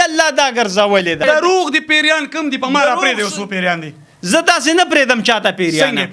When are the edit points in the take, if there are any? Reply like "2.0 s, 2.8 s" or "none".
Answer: 1.2 s